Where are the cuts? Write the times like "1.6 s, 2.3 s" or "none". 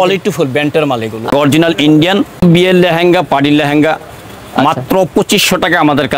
1.3 s, 2.4 s